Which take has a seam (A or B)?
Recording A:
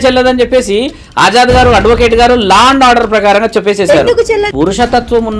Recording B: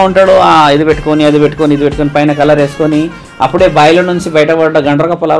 A